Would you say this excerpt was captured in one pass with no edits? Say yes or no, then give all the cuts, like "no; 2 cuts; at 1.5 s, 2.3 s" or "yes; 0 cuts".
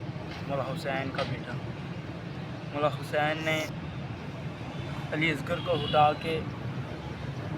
no; 1 cut; at 3.7 s